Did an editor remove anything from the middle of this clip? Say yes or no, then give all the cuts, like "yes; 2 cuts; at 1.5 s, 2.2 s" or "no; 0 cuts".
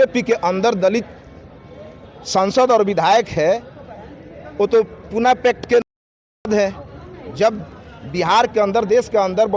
no; 0 cuts